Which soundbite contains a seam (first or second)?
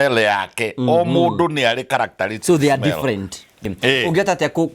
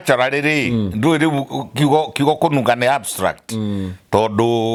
first